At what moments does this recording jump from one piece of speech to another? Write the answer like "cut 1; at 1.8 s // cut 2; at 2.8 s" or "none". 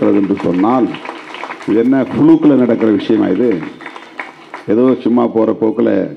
none

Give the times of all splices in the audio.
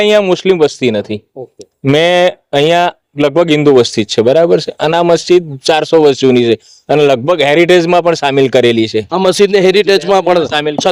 none

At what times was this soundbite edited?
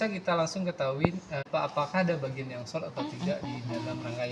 cut 1; at 1.5 s

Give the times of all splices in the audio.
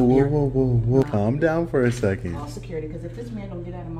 cut 1; at 1.0 s

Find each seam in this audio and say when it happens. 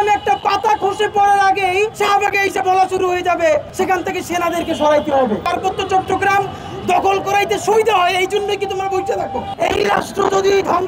cut 1; at 1.9 s // cut 2; at 3.7 s // cut 3; at 5.4 s // cut 4; at 9.5 s

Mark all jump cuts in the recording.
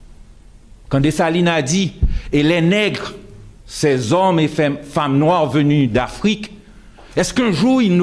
cut 1; at 1.1 s

